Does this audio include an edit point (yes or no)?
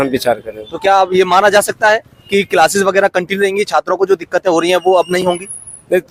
no